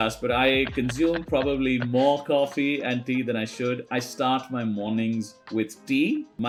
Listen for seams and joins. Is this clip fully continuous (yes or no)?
yes